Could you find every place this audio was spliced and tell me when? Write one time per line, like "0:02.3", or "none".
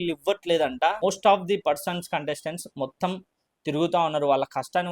0:01.0